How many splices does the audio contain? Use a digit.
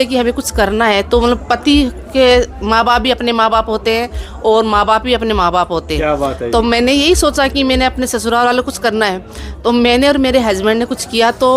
0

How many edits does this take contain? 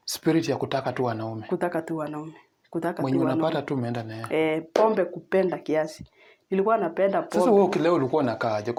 0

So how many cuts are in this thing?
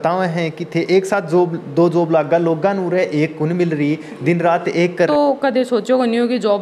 1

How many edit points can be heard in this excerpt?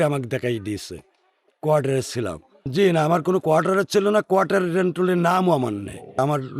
1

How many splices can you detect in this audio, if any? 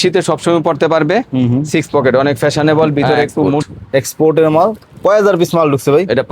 1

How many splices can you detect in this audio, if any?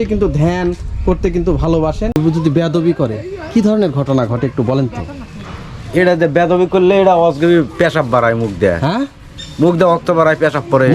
1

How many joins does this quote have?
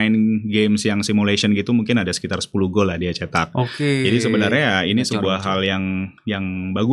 0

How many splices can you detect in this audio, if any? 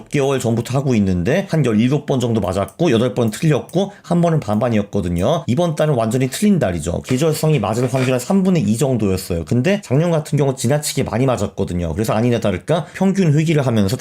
5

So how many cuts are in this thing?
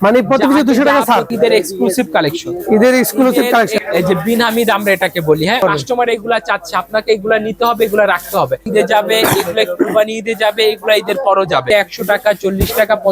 5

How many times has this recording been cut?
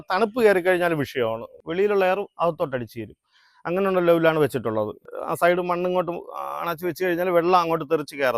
2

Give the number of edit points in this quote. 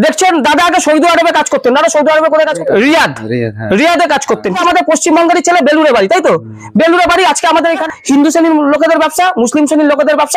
3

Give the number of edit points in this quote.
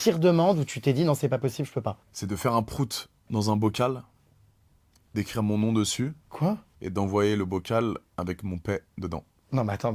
2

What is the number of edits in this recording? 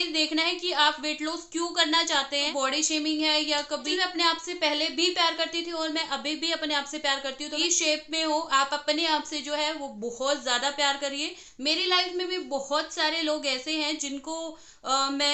4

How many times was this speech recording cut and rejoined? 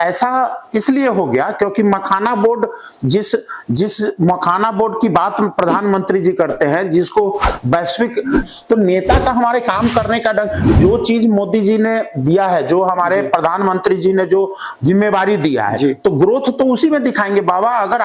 1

